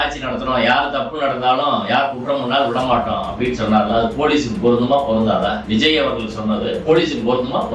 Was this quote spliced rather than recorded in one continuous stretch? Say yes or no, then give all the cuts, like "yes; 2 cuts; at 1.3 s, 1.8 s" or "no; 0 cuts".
no; 0 cuts